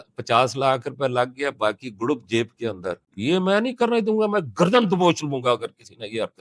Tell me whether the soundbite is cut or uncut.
uncut